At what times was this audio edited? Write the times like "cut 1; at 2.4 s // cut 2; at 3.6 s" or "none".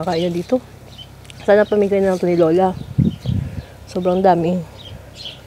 none